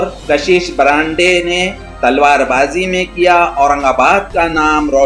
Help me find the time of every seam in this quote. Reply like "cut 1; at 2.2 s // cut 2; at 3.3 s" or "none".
none

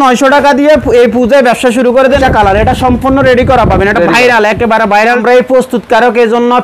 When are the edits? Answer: cut 1; at 2.2 s // cut 2; at 5.2 s

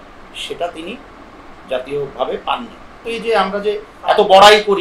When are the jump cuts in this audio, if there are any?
cut 1; at 3.0 s

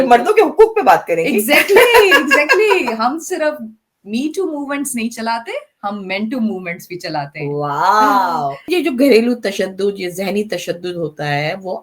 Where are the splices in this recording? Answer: cut 1; at 8.6 s

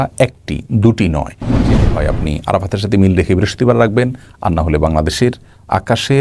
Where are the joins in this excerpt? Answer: cut 1; at 1.7 s

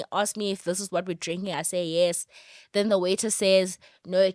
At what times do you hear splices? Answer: none

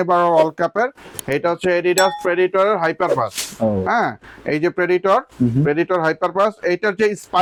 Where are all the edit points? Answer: none

